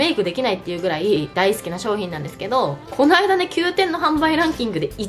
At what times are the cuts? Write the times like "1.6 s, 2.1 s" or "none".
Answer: 2.8 s